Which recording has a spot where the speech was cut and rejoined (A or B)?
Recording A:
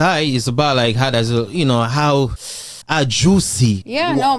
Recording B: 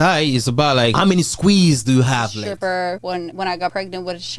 B